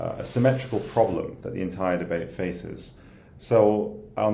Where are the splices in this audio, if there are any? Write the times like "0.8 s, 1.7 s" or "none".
none